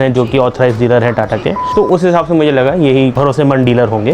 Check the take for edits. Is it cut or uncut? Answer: cut